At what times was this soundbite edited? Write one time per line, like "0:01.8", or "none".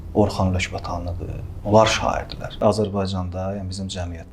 0:02.6